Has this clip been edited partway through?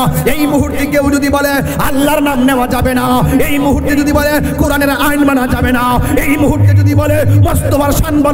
no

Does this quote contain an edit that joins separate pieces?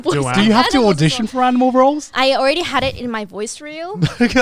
yes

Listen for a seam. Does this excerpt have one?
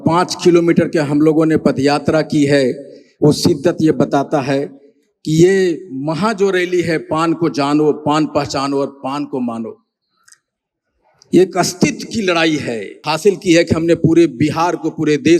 yes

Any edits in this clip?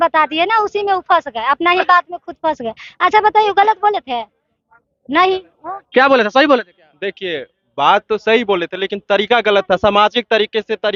no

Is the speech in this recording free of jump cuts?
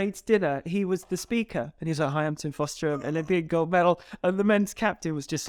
yes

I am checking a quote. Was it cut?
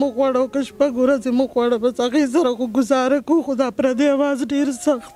no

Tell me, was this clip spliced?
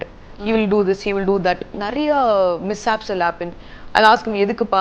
no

